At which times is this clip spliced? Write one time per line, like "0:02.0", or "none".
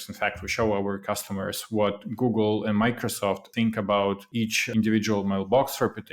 0:03.5
0:04.5